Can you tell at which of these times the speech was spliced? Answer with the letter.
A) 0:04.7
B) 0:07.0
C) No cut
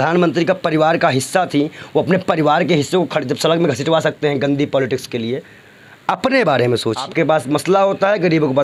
B